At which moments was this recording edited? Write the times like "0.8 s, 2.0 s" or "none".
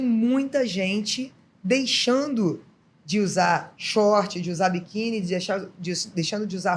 none